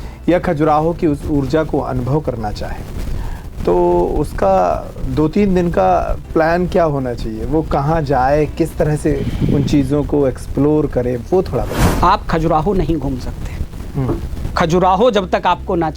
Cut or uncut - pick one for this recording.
cut